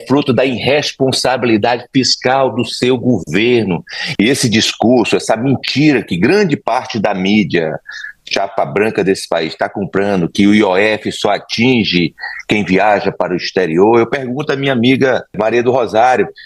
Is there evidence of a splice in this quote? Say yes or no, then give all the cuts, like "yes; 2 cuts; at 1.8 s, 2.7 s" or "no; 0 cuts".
yes; 2 cuts; at 3.9 s, 15.4 s